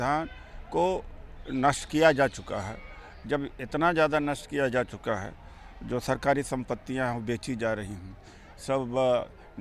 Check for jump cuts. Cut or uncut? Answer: uncut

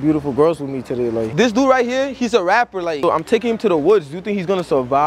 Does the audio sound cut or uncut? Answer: cut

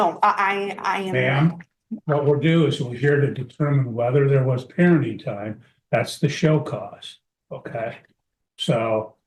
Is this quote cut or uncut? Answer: uncut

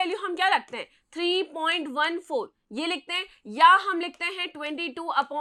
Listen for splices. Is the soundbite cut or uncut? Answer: uncut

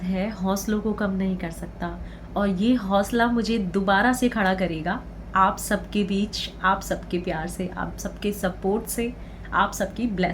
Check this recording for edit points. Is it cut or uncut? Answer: uncut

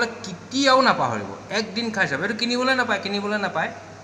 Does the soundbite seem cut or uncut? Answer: uncut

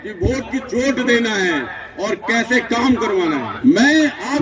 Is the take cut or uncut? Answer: cut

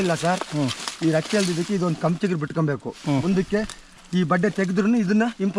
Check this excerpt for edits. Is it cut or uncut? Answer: uncut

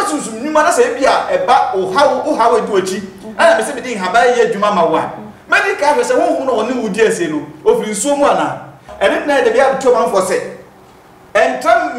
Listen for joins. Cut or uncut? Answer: cut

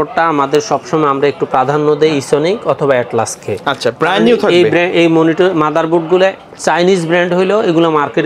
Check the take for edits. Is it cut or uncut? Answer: uncut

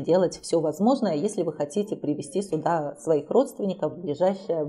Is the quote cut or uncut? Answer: uncut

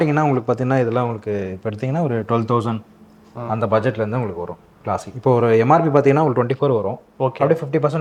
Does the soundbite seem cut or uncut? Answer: uncut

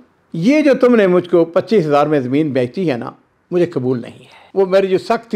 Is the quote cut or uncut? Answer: cut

